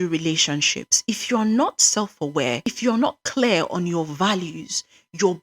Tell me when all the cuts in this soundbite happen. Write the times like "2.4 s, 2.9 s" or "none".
2.7 s